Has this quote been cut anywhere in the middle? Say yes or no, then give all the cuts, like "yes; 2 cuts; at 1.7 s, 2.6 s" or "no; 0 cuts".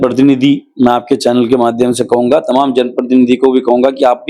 no; 0 cuts